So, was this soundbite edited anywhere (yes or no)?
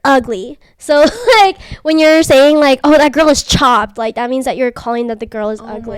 no